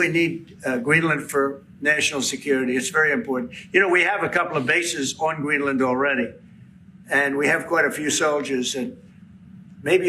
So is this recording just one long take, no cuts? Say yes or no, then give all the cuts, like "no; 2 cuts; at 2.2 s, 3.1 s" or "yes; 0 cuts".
yes; 0 cuts